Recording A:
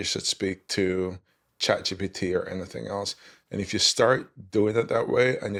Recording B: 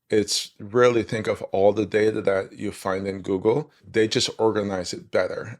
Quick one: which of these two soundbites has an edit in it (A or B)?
B